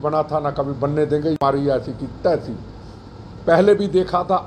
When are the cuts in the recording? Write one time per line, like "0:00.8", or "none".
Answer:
0:01.4